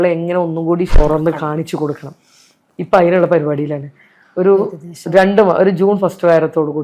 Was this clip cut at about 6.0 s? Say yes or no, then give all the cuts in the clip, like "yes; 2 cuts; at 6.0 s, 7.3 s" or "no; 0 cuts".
no; 1 cut; at 1.0 s